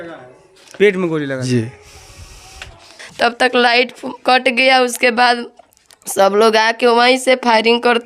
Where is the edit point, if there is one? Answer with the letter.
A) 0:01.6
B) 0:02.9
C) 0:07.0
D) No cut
B